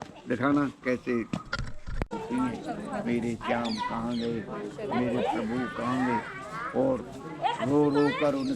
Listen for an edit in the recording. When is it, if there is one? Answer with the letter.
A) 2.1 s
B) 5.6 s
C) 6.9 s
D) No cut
A